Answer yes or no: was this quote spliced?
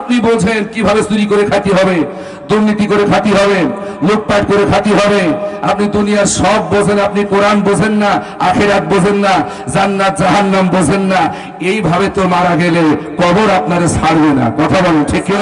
no